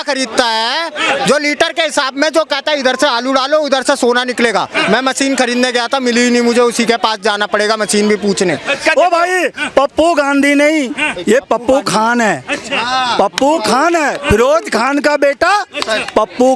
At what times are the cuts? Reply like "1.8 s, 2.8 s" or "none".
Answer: 8.8 s